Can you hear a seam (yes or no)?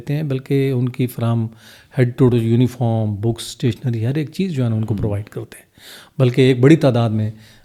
no